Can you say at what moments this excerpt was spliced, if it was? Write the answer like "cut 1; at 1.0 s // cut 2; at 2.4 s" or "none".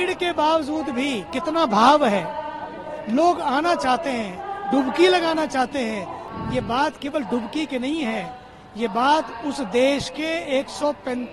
cut 1; at 6.2 s